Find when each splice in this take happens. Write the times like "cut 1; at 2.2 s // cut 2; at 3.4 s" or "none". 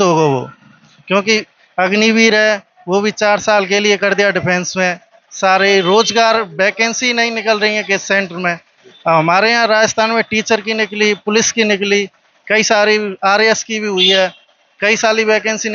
none